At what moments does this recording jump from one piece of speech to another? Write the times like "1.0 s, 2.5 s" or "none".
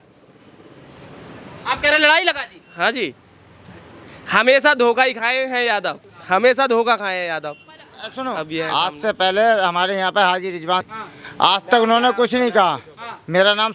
7.9 s, 10.9 s